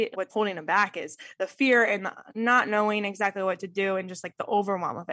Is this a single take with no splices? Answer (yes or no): yes